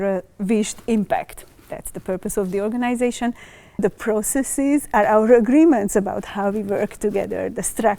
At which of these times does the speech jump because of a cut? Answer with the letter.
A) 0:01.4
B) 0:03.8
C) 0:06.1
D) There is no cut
B